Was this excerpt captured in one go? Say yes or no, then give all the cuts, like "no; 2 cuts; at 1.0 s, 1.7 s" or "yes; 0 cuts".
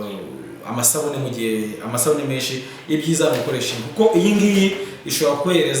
yes; 0 cuts